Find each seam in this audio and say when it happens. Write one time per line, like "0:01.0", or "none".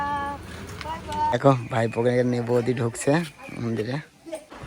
0:01.3